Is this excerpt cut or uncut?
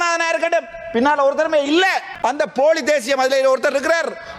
cut